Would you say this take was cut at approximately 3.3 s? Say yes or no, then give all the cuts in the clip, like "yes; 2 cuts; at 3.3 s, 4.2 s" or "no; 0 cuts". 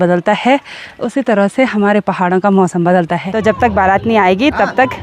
yes; 1 cut; at 3.3 s